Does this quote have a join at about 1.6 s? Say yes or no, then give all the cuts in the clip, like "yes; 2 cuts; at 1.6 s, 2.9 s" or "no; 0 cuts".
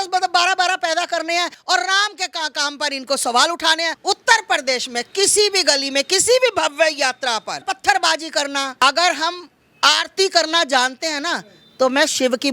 yes; 4 cuts; at 1.6 s, 4.0 s, 7.6 s, 8.8 s